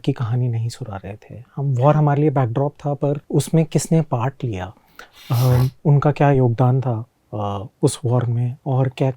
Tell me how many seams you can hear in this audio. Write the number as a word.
one